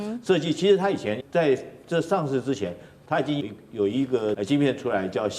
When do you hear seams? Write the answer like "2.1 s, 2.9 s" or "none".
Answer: 1.2 s, 3.4 s, 4.4 s